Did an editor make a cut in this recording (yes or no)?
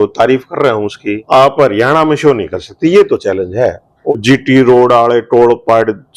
yes